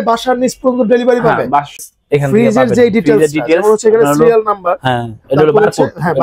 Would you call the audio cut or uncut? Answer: cut